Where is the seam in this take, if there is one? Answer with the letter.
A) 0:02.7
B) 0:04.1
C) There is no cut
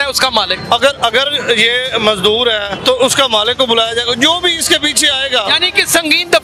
A